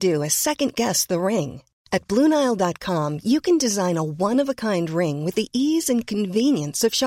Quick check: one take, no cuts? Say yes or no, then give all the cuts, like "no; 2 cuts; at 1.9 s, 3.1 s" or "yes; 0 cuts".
yes; 0 cuts